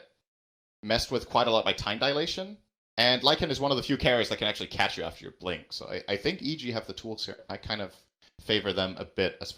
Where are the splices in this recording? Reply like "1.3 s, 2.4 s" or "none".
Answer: 3.6 s